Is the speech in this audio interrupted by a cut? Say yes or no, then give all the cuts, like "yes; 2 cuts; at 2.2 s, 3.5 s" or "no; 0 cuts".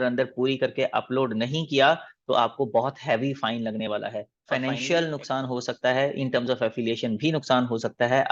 yes; 1 cut; at 4.3 s